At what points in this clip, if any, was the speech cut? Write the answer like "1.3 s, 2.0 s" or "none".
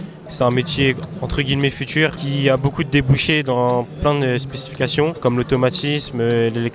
2.2 s, 5.2 s